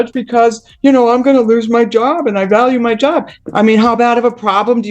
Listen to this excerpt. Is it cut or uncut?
cut